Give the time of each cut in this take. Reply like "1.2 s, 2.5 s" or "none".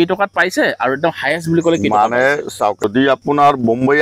2.8 s